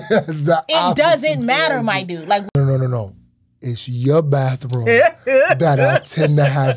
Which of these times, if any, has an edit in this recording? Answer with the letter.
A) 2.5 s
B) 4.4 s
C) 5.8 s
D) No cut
A